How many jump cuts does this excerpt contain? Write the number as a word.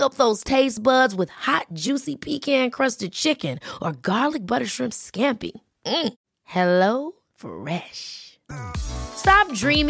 zero